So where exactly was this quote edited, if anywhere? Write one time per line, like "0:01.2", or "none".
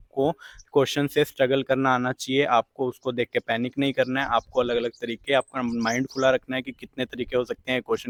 none